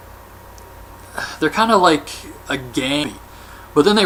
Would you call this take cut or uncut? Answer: uncut